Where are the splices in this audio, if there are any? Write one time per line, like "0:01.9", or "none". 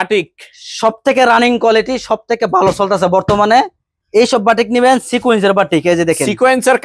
none